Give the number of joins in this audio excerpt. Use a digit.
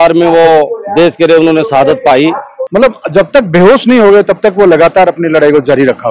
1